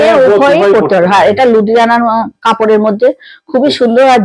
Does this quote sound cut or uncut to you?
uncut